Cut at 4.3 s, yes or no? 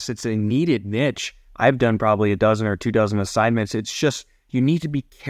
no